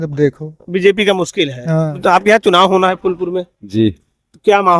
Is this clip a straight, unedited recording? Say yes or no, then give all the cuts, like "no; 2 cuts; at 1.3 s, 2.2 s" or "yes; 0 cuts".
no; 1 cut; at 2.0 s